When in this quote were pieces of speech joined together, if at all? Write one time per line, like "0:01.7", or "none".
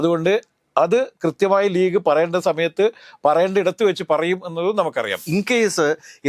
0:05.2